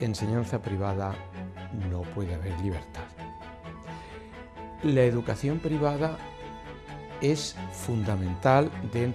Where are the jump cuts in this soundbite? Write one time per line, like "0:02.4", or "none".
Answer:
none